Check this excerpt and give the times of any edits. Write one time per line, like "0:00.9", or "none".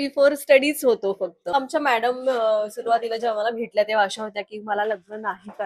0:01.5